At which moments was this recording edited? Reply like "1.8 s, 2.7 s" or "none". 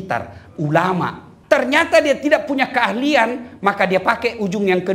1.3 s